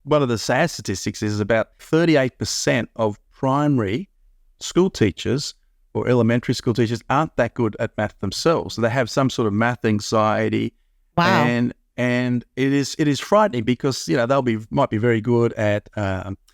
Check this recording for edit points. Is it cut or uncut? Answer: cut